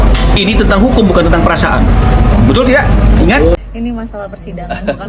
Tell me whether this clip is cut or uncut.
uncut